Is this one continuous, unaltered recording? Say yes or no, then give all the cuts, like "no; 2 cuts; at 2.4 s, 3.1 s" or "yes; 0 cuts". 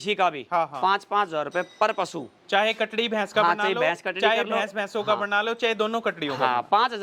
yes; 0 cuts